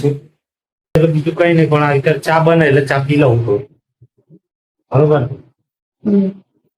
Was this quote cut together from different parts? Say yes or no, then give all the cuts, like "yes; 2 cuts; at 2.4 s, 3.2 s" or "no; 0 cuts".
yes; 1 cut; at 1.0 s